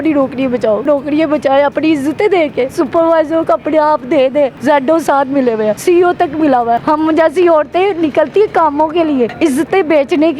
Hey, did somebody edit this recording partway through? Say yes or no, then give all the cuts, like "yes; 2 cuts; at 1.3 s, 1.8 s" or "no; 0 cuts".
yes; 6 cuts; at 0.8 s, 2.7 s, 4.6 s, 5.8 s, 6.8 s, 9.3 s